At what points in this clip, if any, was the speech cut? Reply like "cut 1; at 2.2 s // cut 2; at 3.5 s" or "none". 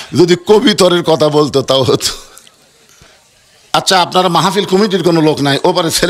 cut 1; at 3.1 s